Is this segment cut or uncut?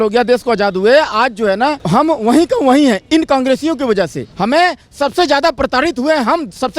cut